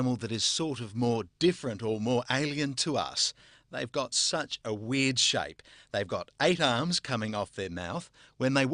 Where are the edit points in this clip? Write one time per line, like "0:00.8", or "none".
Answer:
0:05.7